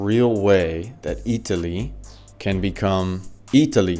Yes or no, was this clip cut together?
no